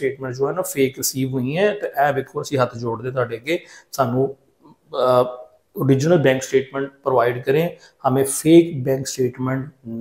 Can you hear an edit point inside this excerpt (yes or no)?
no